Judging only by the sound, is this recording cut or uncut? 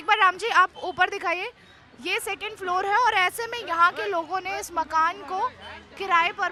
uncut